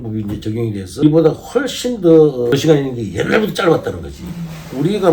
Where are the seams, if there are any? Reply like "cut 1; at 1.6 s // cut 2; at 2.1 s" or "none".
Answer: cut 1; at 1.0 s // cut 2; at 2.5 s

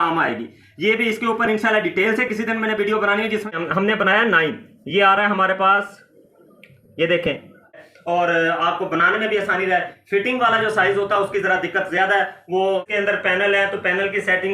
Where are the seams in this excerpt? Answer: cut 1; at 3.6 s // cut 2; at 7.8 s // cut 3; at 12.9 s

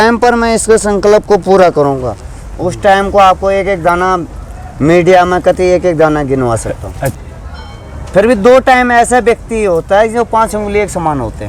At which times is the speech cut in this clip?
cut 1; at 7.1 s

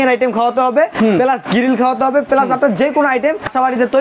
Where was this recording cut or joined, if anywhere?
none

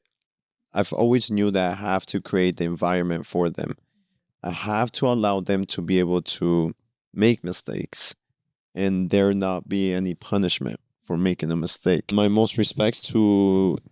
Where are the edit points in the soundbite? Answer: cut 1; at 12.1 s

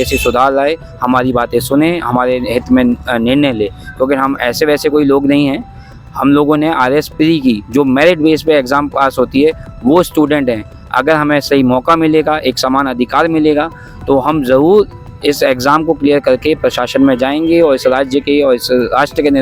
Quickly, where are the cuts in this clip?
none

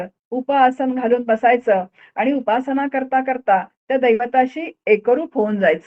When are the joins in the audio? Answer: none

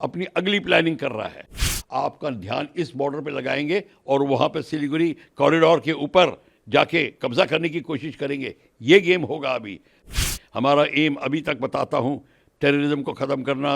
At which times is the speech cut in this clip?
cut 1; at 1.7 s // cut 2; at 9.9 s

